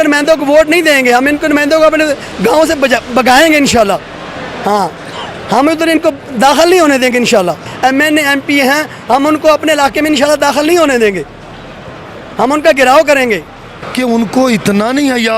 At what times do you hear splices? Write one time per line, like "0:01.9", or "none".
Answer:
0:07.7
0:13.8